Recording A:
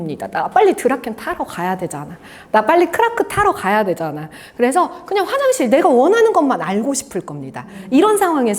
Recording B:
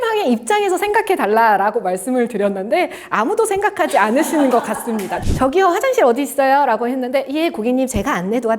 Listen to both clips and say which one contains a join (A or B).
B